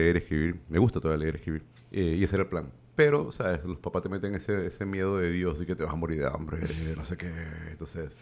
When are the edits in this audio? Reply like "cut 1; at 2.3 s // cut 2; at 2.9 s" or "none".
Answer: cut 1; at 1.7 s